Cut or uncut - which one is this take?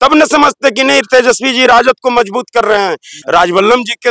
cut